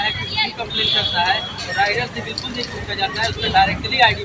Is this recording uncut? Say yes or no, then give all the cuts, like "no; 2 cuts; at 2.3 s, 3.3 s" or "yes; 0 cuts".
yes; 0 cuts